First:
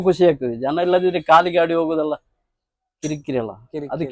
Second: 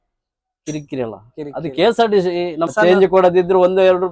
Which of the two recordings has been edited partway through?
second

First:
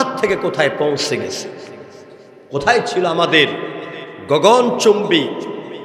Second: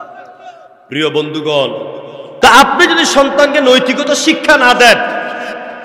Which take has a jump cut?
second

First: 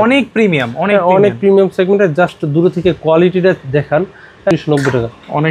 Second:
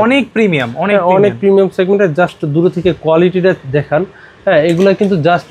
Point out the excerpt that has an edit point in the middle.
first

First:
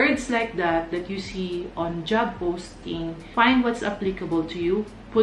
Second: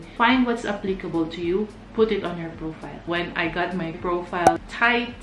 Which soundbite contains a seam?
second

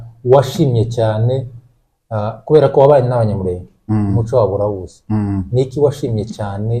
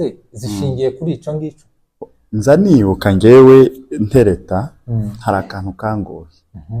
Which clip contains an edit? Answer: second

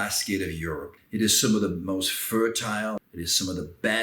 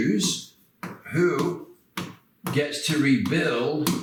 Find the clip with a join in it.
first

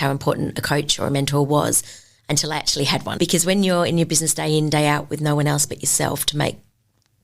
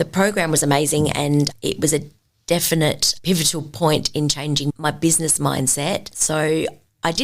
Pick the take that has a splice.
second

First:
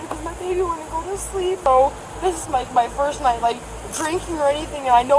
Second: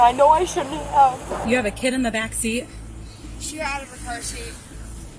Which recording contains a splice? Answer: second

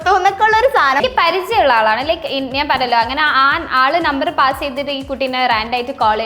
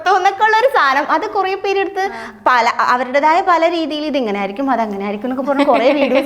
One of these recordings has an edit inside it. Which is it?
first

